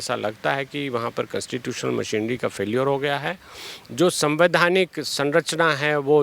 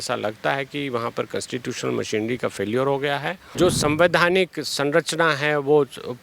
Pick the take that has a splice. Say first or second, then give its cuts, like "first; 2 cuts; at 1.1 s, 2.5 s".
second; 1 cut; at 3.4 s